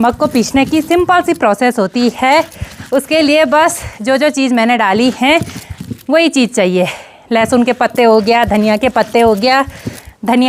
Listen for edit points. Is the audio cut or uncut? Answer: uncut